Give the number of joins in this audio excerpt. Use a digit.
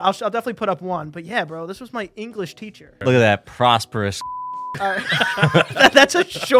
1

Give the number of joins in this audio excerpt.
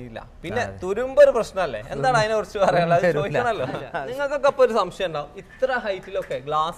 1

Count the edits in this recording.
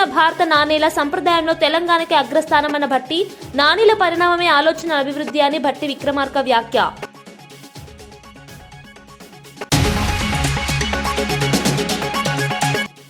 0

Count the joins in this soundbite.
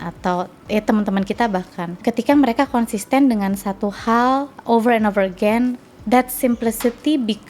2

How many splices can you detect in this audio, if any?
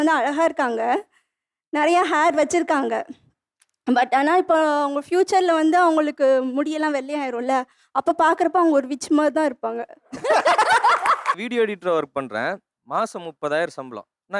1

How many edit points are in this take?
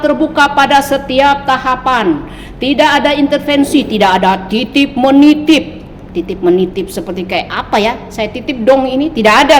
0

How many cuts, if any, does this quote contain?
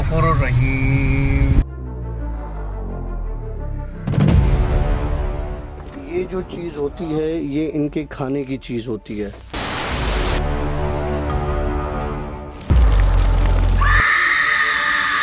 0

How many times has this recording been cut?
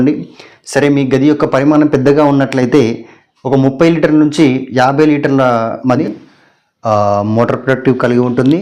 1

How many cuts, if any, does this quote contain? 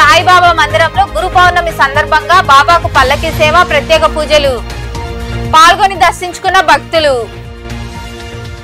0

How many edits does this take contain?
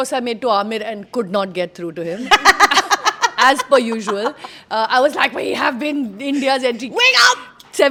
0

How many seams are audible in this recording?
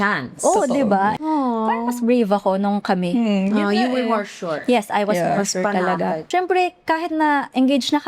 2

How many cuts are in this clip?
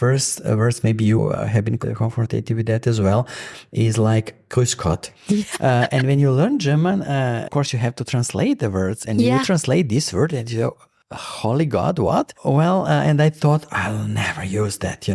2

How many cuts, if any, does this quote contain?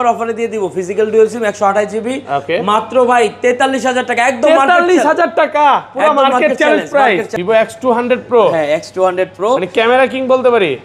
1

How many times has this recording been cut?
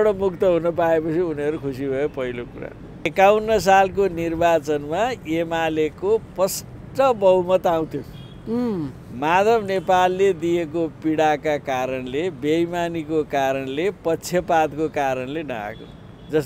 1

